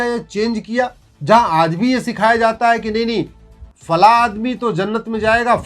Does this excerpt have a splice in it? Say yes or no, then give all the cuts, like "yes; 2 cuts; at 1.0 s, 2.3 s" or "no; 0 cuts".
yes; 1 cut; at 1.1 s